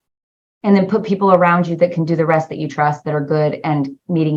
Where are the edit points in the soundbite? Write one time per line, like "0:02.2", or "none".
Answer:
none